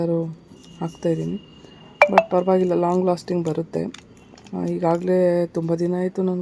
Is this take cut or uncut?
uncut